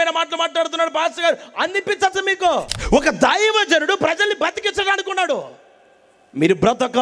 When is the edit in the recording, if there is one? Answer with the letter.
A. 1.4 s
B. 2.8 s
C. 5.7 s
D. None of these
B